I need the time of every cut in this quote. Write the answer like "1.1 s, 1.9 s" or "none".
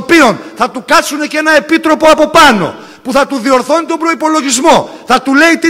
none